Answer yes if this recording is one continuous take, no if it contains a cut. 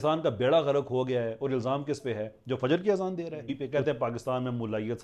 no